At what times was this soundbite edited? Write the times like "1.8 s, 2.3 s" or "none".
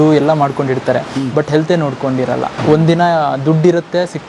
2.6 s